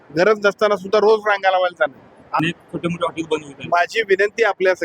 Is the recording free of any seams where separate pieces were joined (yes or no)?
no